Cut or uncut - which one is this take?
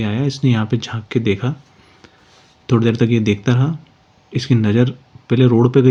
uncut